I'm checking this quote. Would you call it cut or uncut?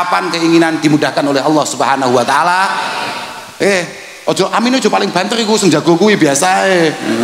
uncut